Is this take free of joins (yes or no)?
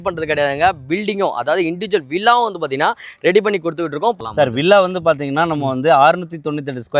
no